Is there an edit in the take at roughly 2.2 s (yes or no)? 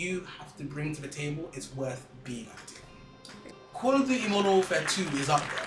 no